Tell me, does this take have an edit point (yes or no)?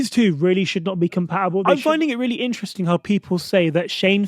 yes